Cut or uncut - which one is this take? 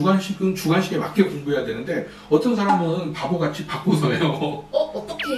uncut